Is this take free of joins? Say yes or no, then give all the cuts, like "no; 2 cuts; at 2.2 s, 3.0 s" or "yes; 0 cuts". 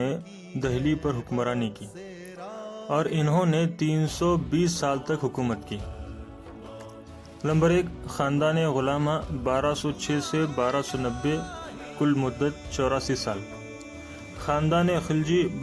no; 2 cuts; at 5.8 s, 7.4 s